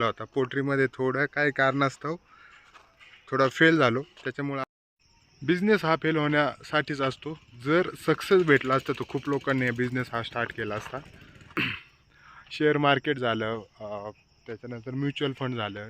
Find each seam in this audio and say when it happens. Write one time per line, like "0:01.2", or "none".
0:04.6
0:11.7

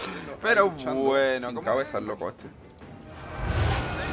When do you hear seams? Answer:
0:01.5

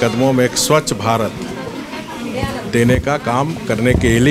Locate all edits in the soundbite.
none

